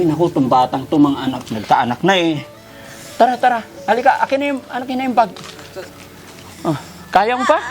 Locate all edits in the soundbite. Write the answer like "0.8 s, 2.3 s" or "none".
none

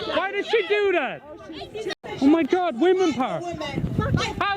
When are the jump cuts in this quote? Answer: 1.8 s

